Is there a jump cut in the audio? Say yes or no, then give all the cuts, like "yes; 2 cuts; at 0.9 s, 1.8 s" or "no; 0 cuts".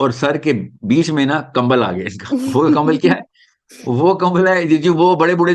no; 0 cuts